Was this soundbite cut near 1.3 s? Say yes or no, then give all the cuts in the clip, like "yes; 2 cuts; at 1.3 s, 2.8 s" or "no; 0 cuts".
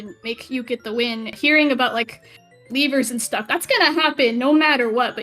yes; 1 cut; at 1.3 s